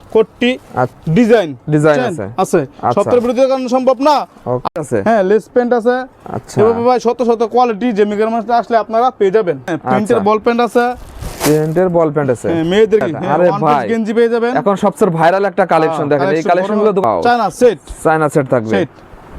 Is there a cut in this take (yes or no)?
yes